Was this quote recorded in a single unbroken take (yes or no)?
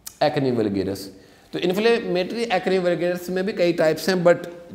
yes